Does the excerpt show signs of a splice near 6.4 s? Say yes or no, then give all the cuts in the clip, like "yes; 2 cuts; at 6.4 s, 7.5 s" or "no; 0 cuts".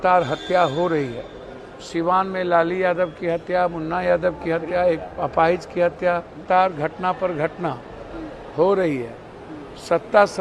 yes; 1 cut; at 6.4 s